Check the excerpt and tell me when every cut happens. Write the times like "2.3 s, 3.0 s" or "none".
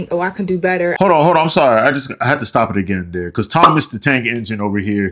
none